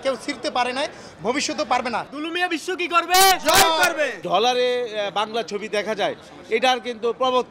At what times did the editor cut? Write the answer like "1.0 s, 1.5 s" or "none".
2.1 s, 4.2 s